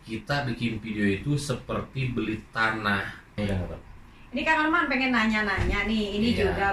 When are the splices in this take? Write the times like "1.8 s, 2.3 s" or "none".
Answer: 3.4 s